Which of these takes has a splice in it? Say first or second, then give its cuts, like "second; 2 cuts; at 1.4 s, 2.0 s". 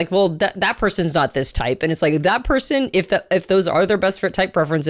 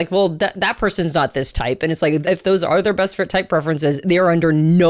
second; 1 cut; at 2.2 s